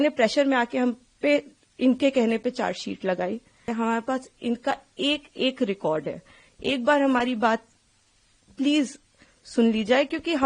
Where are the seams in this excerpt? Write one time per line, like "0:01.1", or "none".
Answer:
0:03.6